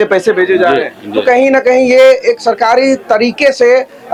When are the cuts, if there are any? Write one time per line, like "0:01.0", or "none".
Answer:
none